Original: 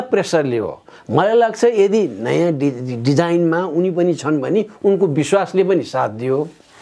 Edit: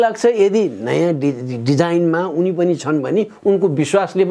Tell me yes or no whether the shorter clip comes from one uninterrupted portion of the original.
yes